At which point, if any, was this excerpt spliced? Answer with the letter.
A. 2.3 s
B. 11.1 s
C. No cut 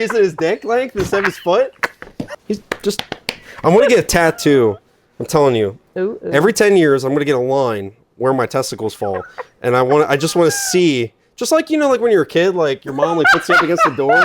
A